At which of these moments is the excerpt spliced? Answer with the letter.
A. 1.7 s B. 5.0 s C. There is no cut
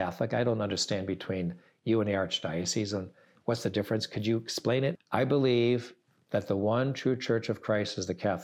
B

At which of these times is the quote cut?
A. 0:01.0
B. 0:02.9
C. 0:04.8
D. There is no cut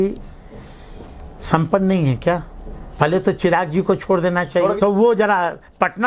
C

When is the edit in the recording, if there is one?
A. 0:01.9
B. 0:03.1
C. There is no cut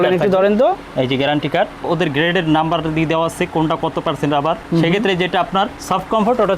A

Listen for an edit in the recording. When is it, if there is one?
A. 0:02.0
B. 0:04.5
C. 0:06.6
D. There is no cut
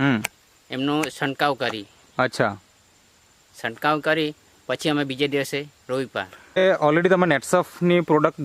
C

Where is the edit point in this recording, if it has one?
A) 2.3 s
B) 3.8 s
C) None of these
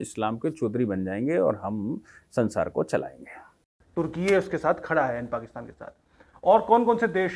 B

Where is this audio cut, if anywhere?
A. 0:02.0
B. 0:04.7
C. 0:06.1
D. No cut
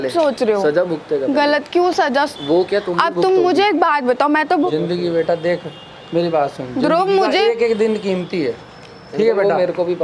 B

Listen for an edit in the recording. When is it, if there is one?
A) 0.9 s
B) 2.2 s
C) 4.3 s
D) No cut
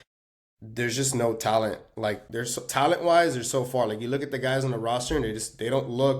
B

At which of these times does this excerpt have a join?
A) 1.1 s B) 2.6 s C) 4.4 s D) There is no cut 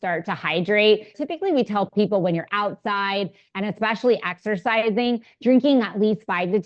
A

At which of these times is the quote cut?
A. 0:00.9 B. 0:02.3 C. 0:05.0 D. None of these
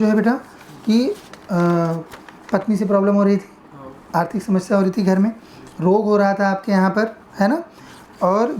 D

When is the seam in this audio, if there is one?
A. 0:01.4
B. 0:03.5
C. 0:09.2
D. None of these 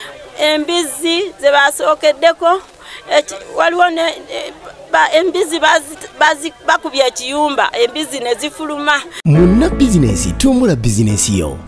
C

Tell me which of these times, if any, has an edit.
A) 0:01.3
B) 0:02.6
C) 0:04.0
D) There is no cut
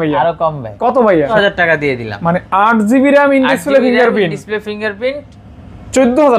A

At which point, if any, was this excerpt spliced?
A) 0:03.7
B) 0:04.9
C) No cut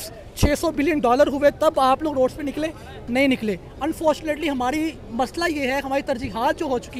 C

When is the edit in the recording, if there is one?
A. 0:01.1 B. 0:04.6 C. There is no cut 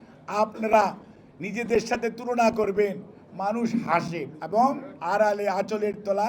B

